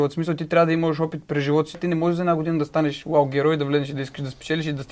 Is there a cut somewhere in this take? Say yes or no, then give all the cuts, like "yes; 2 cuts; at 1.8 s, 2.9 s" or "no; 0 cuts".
yes; 1 cut; at 1.8 s